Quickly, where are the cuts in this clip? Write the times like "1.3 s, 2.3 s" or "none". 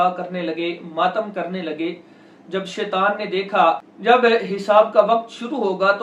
3.9 s